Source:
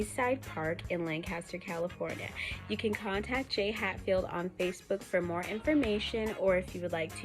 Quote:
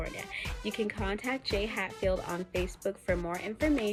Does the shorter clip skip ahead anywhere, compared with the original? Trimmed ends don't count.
no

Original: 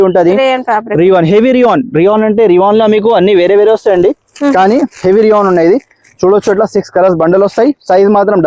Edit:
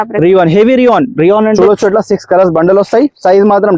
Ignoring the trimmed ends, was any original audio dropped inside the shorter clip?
yes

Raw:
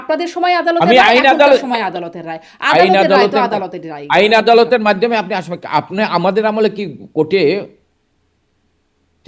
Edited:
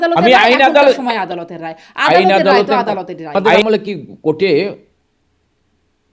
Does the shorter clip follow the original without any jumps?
no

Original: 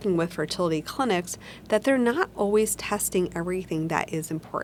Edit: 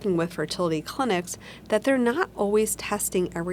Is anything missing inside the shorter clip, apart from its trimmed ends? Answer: no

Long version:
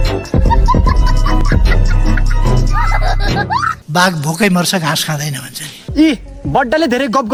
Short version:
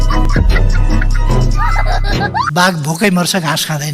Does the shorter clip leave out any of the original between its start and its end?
yes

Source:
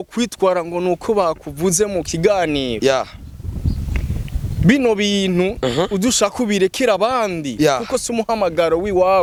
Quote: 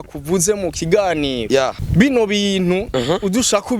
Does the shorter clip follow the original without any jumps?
no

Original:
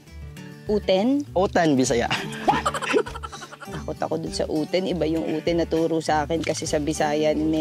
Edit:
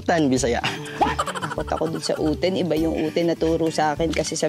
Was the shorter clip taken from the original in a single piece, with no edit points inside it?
no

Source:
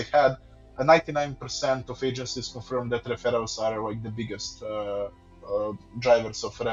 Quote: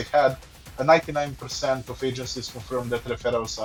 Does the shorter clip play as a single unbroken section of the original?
yes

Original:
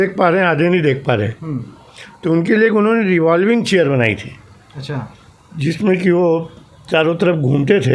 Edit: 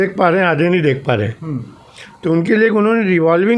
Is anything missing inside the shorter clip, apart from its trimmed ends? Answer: no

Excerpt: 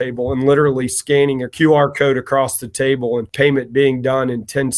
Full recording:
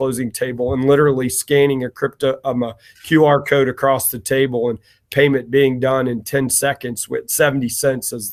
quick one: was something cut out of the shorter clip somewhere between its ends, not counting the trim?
yes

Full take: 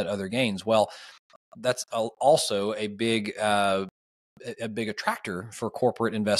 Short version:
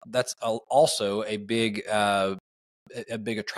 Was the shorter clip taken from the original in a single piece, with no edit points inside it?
yes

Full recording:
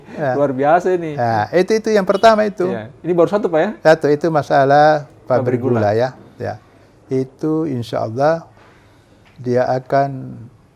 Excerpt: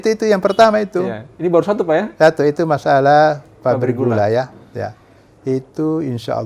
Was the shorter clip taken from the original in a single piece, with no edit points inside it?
yes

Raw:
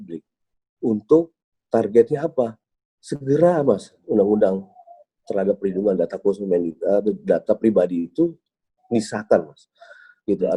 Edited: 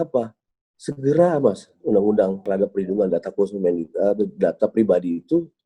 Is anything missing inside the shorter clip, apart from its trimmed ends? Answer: yes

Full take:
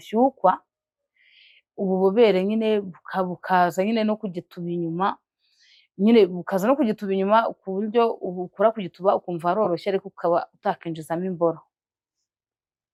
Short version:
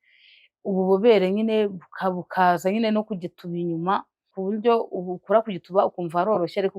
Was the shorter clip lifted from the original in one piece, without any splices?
no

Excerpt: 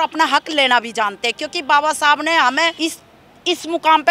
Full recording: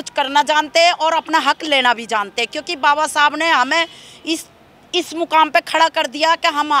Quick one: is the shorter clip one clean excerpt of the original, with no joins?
no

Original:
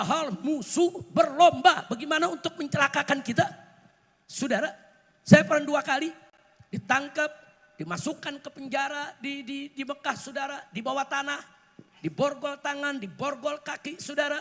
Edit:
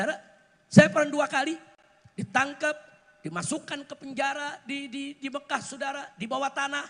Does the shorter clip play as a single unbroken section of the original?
yes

